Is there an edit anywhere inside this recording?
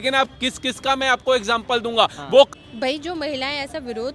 yes; 1 cut; at 2.5 s

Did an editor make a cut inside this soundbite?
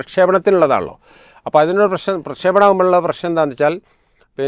no; 0 cuts

